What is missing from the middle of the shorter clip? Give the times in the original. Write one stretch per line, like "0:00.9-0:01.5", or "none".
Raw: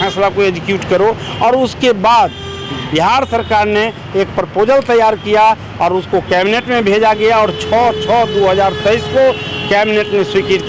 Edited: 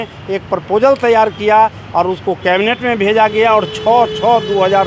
none